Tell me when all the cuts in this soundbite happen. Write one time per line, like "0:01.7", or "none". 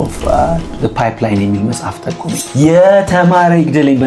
0:02.4